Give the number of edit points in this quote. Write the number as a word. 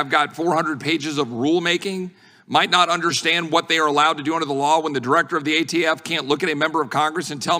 zero